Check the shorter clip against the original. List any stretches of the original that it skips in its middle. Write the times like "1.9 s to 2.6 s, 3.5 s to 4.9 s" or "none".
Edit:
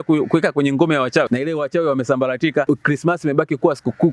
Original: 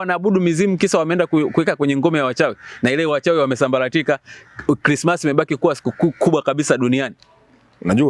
2.5 s to 2.8 s, 4.2 s to 4.6 s